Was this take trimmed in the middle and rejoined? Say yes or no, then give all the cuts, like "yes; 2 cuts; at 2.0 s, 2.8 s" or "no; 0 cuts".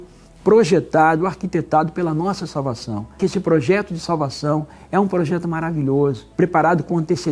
yes; 2 cuts; at 3.2 s, 6.2 s